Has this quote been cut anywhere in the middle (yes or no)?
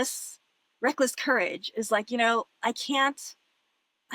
no